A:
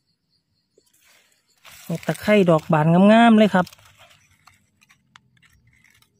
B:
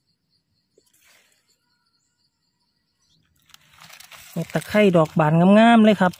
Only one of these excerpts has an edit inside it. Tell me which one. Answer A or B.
A